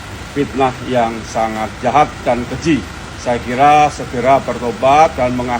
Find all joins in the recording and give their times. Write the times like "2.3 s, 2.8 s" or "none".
none